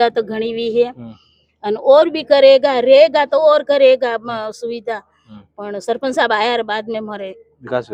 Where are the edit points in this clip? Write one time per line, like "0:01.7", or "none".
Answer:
none